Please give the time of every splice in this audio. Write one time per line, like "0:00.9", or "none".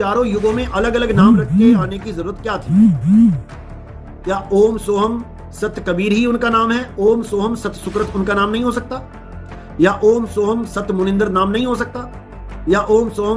none